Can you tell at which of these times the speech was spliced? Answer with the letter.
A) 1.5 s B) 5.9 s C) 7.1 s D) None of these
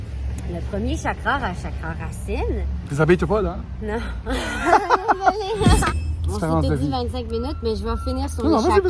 B